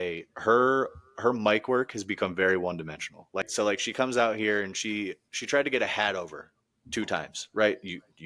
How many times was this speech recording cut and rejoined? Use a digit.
1